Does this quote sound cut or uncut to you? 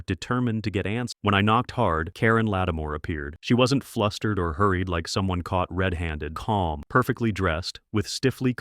cut